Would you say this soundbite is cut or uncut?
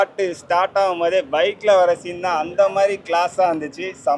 uncut